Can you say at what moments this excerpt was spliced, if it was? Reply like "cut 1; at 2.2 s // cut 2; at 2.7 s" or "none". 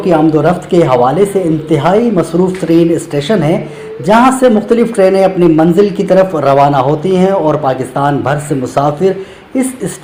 none